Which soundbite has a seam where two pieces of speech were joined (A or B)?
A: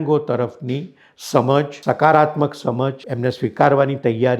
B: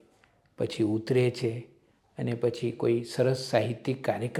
A